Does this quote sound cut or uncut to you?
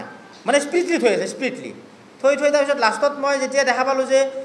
uncut